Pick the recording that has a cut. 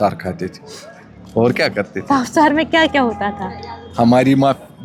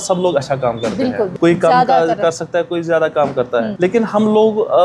second; 2 cuts; at 1.3 s, 3.7 s

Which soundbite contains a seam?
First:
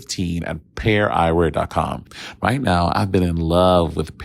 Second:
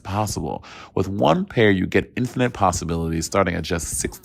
first; 1 cut; at 2.1 s

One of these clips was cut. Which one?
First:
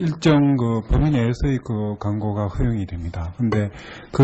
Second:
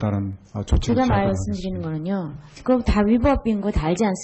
first; 1 cut; at 1.4 s

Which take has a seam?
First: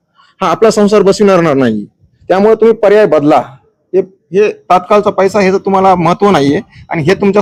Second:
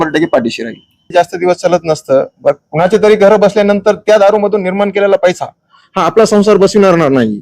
second; 1 cut; at 1.0 s

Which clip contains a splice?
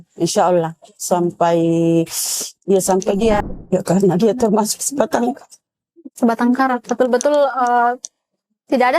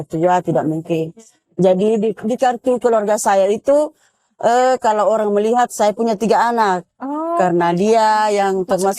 first; 1 cut; at 3.4 s

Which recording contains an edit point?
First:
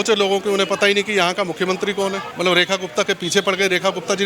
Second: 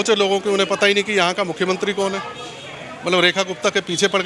first; 1 cut; at 2.3 s

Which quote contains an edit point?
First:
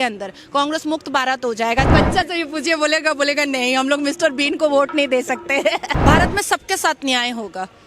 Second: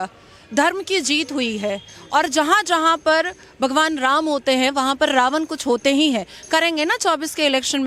first; 2 cuts; at 1.9 s, 6.0 s

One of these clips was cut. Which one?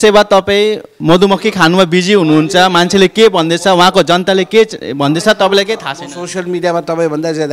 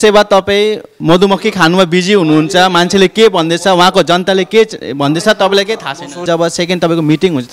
second; 1 cut; at 6.2 s

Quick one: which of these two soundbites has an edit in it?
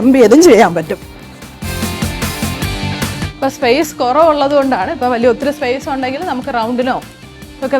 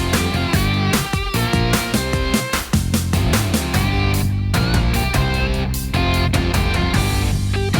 first; 2 cuts; at 1.6 s, 3.2 s

